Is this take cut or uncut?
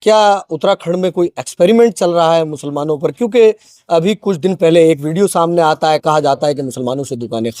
uncut